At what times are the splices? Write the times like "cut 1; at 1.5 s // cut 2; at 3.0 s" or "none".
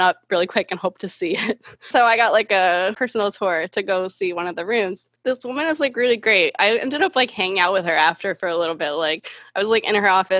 cut 1; at 1.9 s // cut 2; at 5.1 s